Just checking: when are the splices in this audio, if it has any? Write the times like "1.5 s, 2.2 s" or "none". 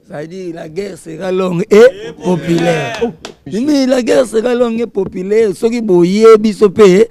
3.4 s